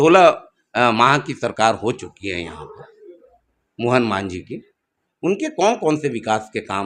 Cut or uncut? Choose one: uncut